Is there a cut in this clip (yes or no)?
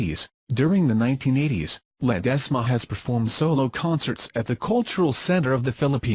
no